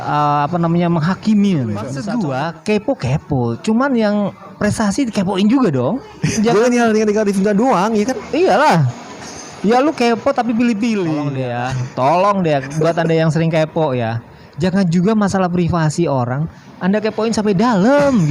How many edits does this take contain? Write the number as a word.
three